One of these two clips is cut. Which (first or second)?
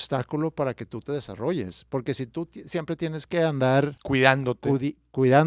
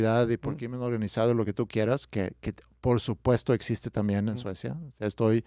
first